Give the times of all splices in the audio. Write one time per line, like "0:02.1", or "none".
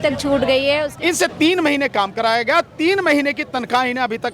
0:00.9